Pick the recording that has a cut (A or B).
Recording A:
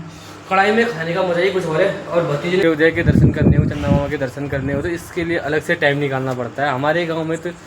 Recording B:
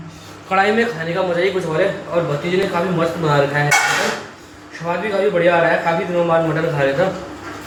A